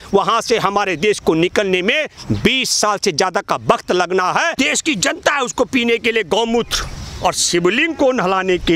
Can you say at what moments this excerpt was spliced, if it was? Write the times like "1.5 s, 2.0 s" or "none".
4.5 s